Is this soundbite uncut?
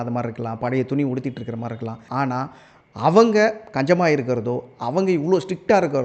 no; 1 cut; at 2.0 s

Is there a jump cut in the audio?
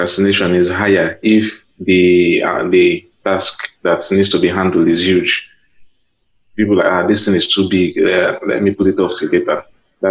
no; 0 cuts

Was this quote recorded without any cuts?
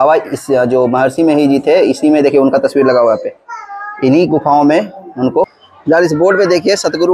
no; 1 cut; at 5.7 s

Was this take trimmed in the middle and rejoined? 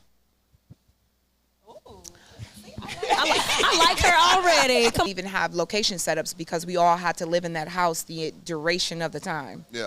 yes; 1 cut; at 5.1 s

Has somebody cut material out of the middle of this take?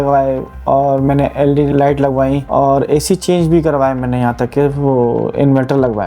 yes; 2 cuts; at 1.7 s, 2.4 s

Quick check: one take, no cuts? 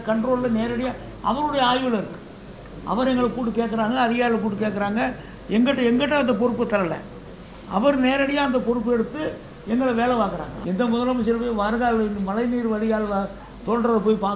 no; 1 cut; at 10.5 s

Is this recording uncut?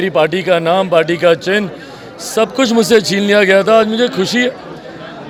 yes; 0 cuts

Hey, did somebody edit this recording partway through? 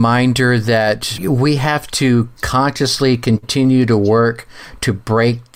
yes; 1 cut; at 1.1 s

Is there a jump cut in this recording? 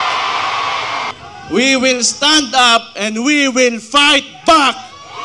yes; 1 cut; at 1.1 s

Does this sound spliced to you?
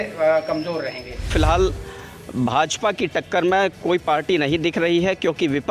yes; 1 cut; at 1.3 s

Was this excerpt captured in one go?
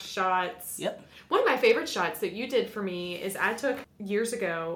yes; 0 cuts

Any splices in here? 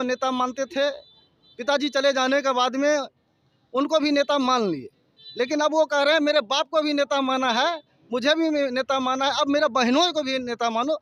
no; 0 cuts

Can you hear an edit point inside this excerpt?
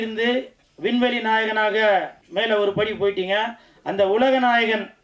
yes; 1 cut; at 2.2 s

